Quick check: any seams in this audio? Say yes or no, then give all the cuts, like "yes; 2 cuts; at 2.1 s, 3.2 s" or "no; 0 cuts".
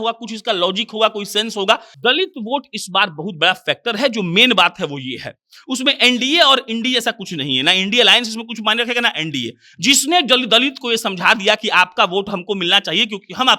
yes; 1 cut; at 1.9 s